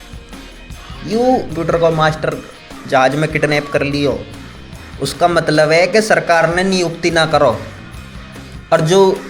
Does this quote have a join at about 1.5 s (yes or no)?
yes